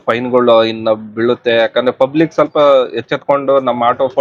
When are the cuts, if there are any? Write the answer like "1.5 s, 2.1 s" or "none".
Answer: none